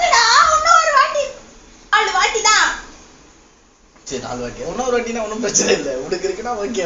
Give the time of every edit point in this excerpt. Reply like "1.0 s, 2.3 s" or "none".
1.9 s